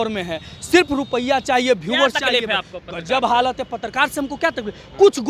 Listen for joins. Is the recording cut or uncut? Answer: uncut